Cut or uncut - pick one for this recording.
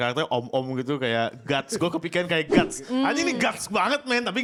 uncut